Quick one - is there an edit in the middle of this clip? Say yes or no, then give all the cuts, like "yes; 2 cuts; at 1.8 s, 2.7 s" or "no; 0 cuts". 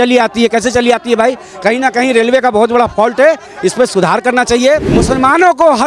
yes; 1 cut; at 5.0 s